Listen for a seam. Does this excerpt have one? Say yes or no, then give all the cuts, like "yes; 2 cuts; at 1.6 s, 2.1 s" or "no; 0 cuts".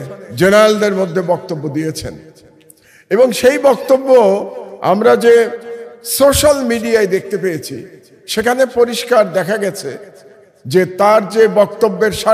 no; 0 cuts